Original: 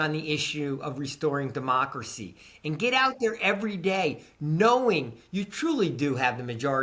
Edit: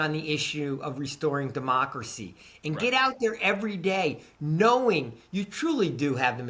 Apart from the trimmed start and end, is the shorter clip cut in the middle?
no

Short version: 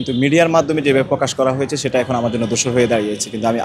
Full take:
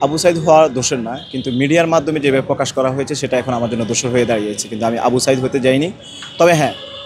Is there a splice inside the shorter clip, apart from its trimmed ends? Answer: no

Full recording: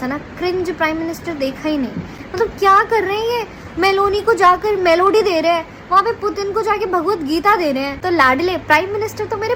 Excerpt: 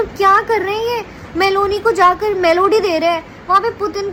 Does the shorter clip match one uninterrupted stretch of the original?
yes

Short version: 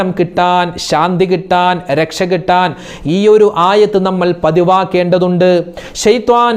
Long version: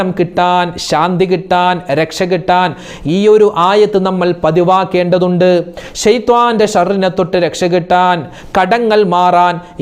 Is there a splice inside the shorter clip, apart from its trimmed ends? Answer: no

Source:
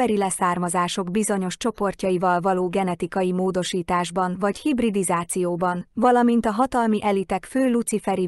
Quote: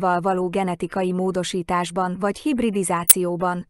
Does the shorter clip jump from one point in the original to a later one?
no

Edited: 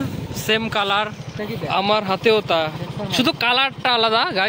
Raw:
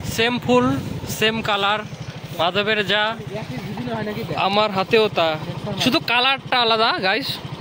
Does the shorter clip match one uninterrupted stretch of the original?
no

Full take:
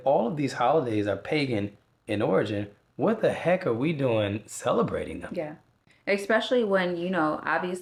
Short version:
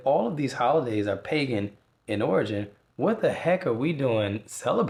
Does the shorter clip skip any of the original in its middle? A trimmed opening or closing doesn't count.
no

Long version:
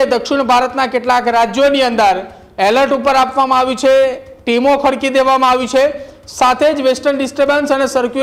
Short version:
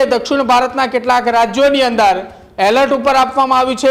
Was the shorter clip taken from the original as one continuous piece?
yes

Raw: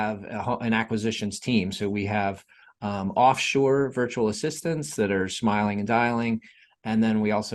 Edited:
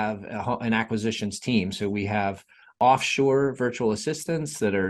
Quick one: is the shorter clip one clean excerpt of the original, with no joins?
no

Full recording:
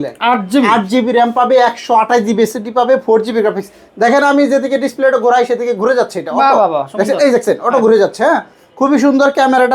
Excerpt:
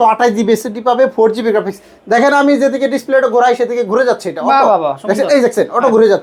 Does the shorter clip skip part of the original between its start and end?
no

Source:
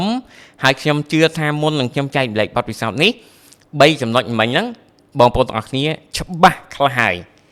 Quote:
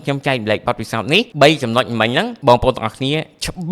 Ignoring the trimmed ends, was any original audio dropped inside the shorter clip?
yes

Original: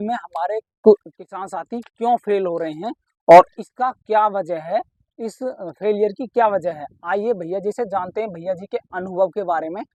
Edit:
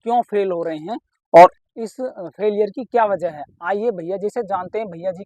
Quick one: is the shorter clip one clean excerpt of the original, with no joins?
no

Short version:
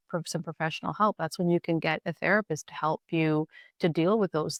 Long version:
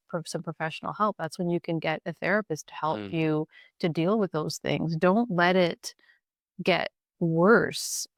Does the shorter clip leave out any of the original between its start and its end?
no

